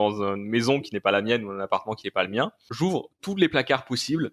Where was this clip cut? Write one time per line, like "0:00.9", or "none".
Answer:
0:03.0